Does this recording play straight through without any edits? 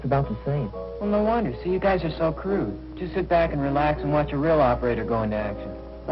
no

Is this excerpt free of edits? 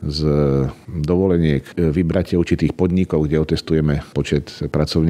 no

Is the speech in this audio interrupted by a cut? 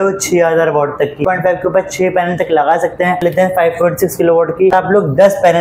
yes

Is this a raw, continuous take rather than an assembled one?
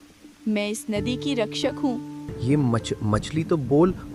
no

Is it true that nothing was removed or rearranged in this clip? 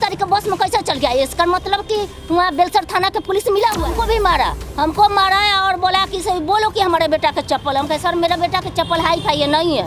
no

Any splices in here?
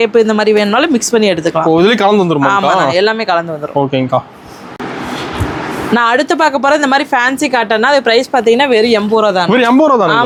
no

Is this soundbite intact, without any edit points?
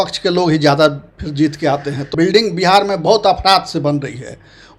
no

